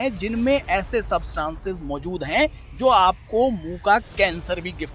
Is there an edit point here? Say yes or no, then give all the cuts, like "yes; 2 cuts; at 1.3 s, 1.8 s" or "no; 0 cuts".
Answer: no; 0 cuts